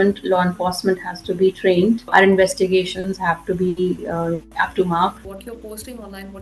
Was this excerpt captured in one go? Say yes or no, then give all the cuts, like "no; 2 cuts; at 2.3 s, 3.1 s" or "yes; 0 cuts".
no; 1 cut; at 5.2 s